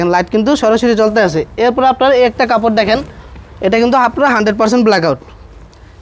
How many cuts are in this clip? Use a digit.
0